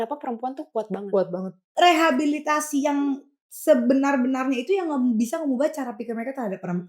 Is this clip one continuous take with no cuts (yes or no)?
no